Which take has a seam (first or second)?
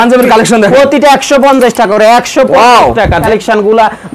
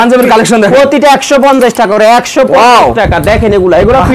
first